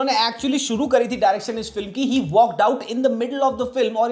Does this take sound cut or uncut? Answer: uncut